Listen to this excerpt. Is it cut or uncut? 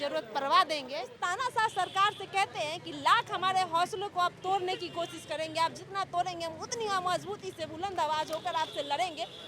cut